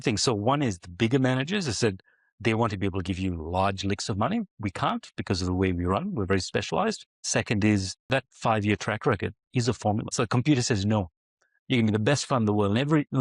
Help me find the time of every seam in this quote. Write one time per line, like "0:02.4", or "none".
0:07.1
0:08.1
0:10.1